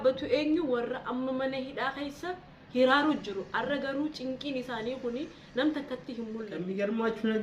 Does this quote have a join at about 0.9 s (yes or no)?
no